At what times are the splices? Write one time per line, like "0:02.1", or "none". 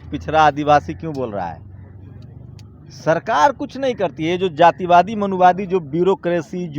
none